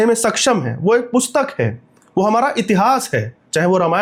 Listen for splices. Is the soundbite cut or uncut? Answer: uncut